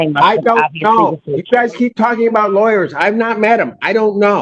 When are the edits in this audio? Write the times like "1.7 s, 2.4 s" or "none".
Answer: none